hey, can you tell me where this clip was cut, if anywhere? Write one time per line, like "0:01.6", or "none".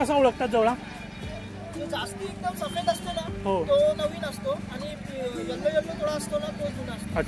none